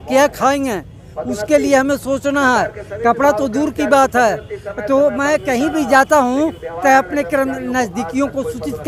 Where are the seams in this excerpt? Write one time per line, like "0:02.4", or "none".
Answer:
none